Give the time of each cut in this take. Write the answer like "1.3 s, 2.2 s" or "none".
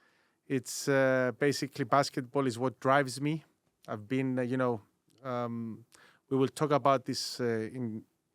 none